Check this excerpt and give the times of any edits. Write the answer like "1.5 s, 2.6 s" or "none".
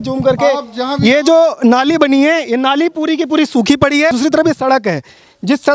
4.1 s